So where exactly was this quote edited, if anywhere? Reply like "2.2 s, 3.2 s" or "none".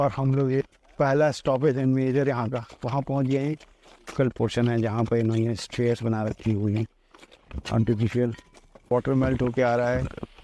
4.1 s, 8.9 s